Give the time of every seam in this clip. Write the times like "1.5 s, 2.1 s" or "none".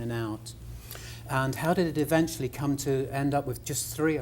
2.2 s